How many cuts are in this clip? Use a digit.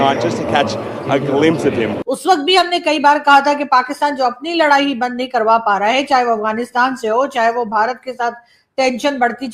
1